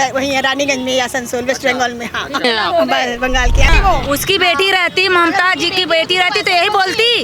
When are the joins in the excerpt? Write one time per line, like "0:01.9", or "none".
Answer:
0:02.4
0:03.7

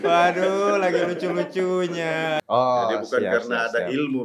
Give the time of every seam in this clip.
0:02.4

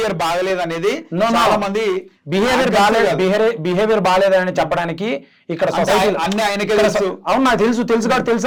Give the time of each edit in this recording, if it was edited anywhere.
none

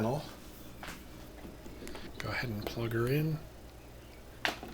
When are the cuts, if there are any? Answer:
0:01.2

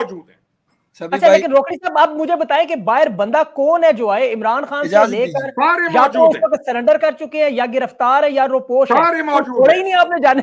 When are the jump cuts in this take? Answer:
none

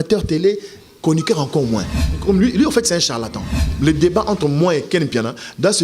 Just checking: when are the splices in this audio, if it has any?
0:02.1
0:03.6

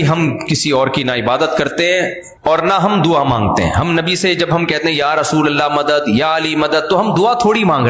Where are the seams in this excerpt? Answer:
0:02.2

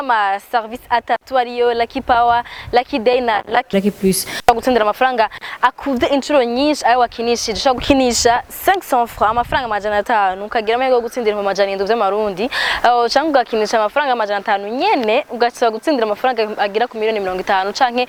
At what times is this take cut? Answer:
none

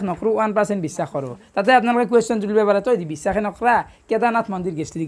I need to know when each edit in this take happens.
none

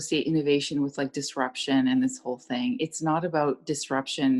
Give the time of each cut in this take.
none

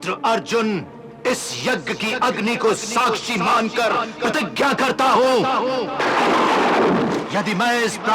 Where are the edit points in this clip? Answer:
none

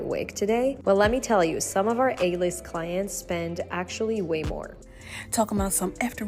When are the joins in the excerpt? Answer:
0:04.7

